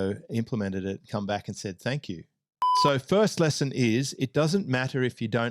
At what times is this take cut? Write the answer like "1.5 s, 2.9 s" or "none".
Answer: 2.7 s

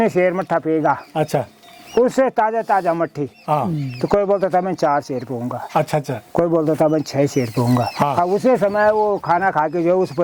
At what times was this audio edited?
none

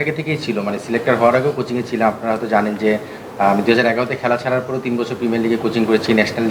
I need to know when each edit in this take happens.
none

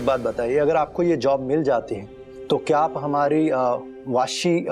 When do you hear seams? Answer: none

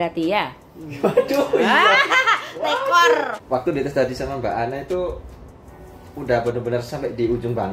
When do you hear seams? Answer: 3.4 s

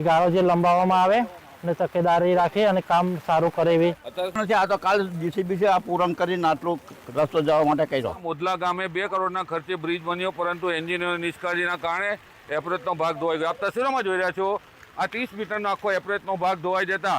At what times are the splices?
4.1 s, 8.3 s

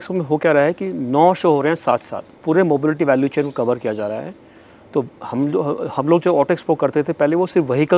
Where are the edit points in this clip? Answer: none

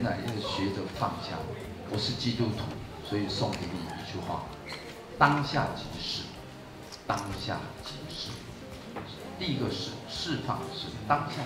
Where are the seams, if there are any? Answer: none

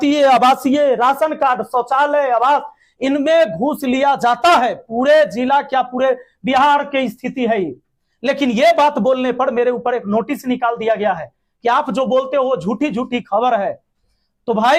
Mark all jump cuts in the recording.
none

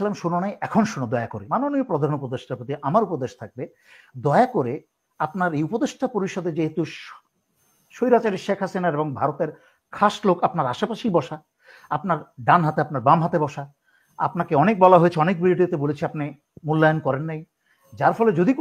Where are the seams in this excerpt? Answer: 1.4 s

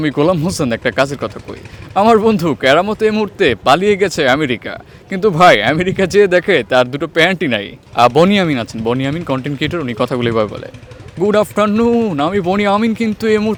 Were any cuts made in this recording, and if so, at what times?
none

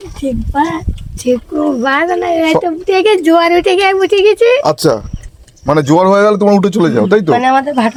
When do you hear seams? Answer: none

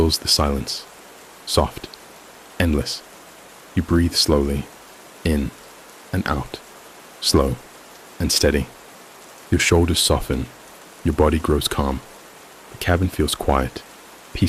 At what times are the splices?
none

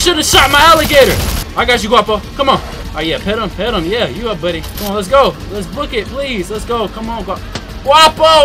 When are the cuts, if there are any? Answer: 1.4 s, 2.8 s, 4.7 s

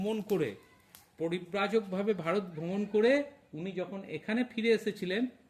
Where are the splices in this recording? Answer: none

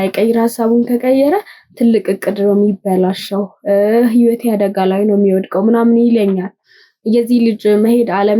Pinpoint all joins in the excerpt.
none

